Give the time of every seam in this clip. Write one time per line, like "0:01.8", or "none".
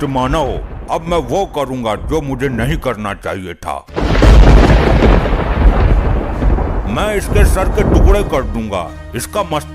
0:03.8